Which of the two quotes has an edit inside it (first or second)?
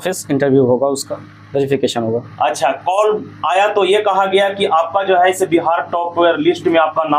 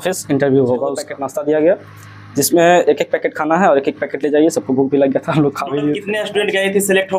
second